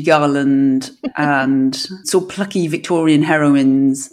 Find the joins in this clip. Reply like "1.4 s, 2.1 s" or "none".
1.0 s, 1.9 s